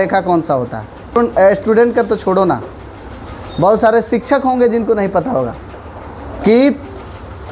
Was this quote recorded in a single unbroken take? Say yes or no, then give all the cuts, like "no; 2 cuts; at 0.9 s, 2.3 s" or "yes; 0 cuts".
no; 1 cut; at 1.2 s